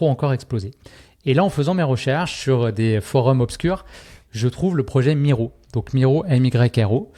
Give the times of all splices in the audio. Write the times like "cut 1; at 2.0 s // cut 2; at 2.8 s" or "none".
none